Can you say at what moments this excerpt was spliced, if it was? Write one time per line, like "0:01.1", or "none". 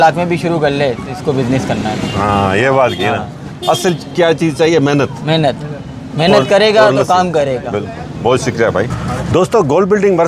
none